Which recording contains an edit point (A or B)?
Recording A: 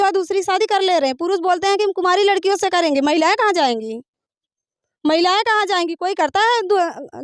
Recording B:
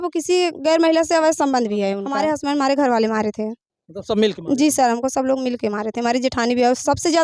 B